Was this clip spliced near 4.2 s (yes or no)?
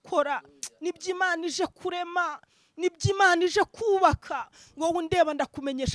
no